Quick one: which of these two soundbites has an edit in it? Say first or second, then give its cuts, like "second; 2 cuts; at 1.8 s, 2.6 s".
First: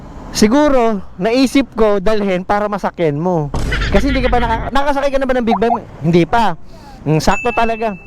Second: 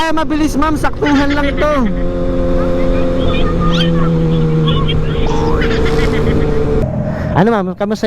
second; 1 cut; at 6.7 s